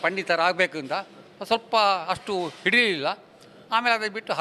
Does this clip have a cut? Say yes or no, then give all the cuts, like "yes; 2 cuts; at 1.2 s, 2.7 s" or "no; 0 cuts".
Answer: no; 0 cuts